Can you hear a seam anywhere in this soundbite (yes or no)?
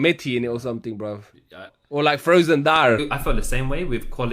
yes